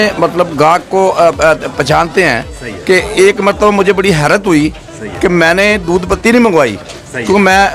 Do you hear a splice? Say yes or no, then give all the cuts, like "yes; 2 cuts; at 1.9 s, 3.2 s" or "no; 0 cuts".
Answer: no; 0 cuts